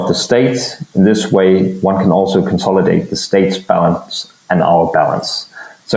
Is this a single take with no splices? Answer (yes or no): yes